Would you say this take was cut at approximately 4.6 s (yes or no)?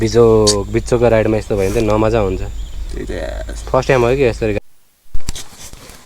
yes